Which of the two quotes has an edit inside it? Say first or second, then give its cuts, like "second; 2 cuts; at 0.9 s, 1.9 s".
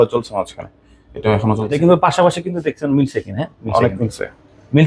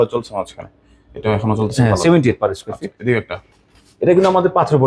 first; 1 cut; at 1.7 s